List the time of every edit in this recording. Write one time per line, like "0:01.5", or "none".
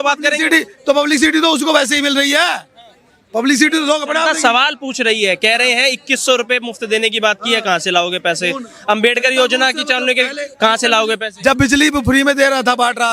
none